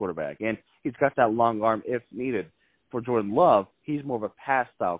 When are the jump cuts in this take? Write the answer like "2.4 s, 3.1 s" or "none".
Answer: none